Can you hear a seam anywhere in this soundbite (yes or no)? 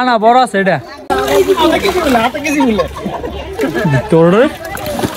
yes